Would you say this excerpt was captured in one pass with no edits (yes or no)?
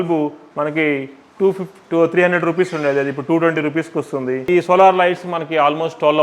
no